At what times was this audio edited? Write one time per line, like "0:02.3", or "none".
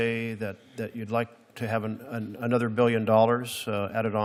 none